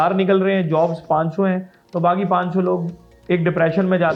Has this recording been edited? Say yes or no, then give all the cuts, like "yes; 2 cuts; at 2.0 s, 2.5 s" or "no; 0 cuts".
no; 0 cuts